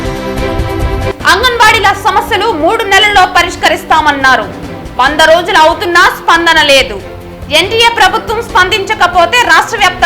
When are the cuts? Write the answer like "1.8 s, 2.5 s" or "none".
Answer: 1.1 s